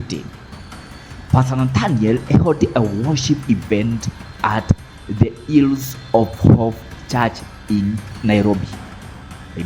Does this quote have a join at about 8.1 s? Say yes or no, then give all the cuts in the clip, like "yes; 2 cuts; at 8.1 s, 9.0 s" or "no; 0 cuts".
yes; 1 cut; at 8.1 s